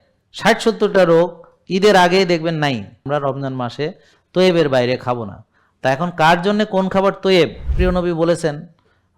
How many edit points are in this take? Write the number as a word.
two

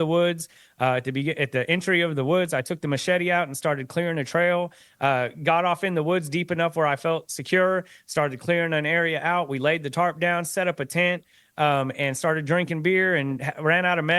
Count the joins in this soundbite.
zero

